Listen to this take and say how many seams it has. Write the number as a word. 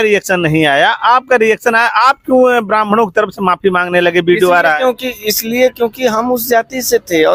zero